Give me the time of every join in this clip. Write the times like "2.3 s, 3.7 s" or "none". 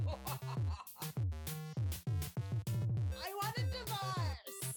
none

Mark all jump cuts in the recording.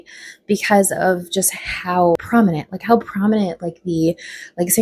2.1 s

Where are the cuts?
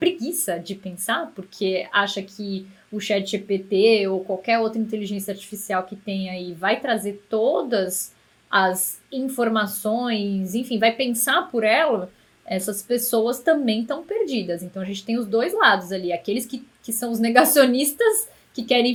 none

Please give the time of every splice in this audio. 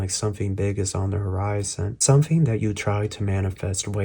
1.9 s

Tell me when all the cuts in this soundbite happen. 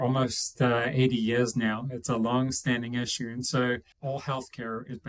3.9 s

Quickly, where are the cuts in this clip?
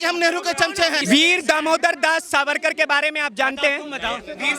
1.0 s

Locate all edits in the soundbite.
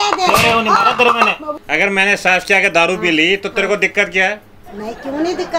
1.5 s

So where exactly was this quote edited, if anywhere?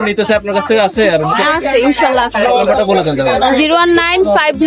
none

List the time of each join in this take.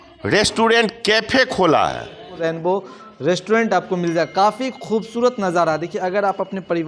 2.3 s

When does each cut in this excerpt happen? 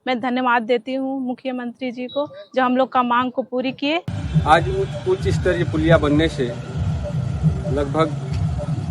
4.2 s

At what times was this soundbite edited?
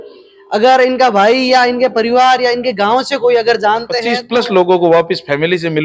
4.0 s

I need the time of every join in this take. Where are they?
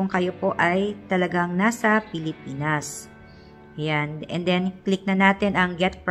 none

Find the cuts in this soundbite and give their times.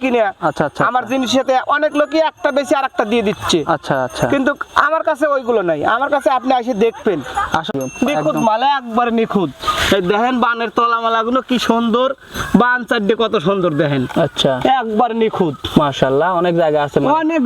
7.7 s

